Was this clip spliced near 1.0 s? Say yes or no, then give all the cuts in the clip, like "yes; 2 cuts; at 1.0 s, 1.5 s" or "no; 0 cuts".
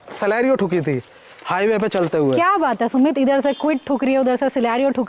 no; 0 cuts